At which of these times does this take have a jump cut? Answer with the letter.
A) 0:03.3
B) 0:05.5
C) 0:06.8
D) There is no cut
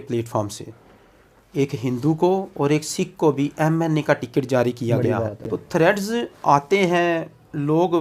B